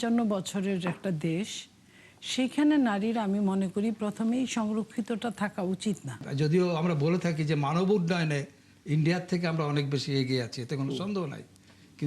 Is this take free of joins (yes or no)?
no